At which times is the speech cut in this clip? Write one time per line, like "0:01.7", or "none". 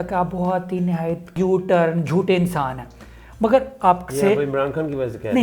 0:01.3